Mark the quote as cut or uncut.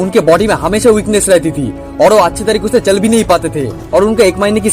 cut